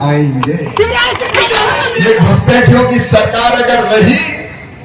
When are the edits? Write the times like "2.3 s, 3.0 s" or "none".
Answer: 1.9 s